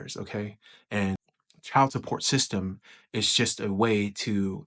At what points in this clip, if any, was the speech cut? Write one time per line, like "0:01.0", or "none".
0:01.2